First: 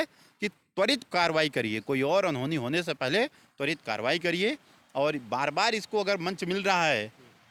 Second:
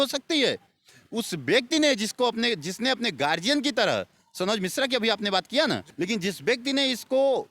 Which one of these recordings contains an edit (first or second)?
second